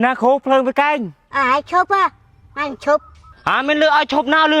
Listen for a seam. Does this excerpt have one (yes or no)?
yes